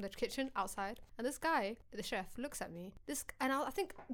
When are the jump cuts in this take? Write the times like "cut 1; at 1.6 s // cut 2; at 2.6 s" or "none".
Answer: cut 1; at 1.0 s // cut 2; at 1.8 s // cut 3; at 2.9 s